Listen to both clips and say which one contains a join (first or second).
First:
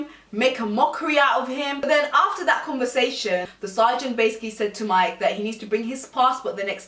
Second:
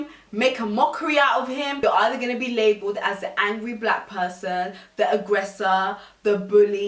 second